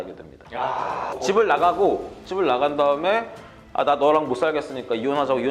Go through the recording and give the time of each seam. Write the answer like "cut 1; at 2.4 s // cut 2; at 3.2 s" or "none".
cut 1; at 1.1 s